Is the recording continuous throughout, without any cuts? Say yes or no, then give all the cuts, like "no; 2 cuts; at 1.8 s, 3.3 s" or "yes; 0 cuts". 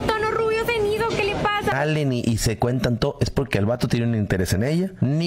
no; 1 cut; at 1.7 s